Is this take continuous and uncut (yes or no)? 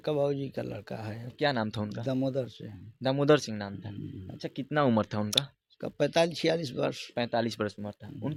yes